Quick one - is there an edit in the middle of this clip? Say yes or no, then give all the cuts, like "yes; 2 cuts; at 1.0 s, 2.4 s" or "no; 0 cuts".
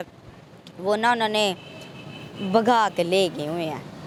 no; 0 cuts